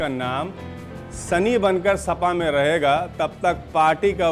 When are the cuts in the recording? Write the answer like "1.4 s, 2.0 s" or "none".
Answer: none